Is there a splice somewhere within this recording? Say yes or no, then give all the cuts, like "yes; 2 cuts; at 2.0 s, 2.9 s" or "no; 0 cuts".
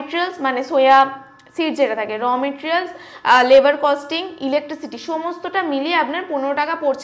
no; 0 cuts